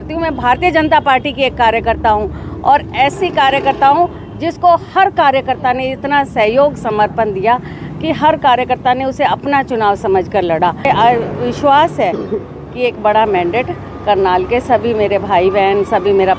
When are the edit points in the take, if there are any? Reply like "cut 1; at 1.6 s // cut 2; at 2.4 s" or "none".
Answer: cut 1; at 10.8 s